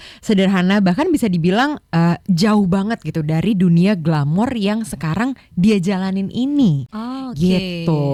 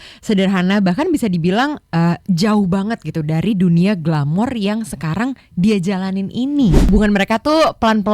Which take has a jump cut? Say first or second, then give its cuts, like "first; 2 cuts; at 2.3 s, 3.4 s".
second; 1 cut; at 6.9 s